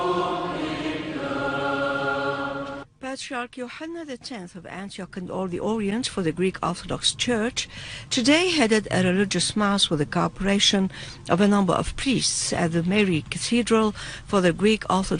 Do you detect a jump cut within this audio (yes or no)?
no